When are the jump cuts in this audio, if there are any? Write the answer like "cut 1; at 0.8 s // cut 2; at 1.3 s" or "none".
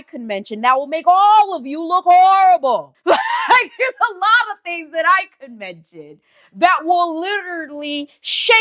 none